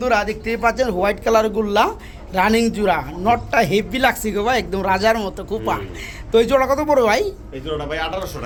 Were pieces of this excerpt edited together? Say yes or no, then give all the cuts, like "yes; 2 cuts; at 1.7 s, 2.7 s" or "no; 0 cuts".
no; 0 cuts